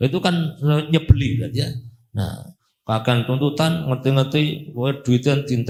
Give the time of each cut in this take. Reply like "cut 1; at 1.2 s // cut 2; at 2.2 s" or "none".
none